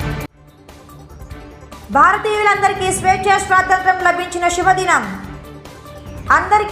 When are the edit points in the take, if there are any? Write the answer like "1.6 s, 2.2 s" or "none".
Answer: 1.8 s